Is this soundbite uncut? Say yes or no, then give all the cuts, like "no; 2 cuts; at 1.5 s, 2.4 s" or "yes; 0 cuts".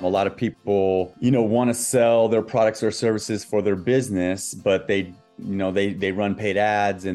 no; 1 cut; at 1.1 s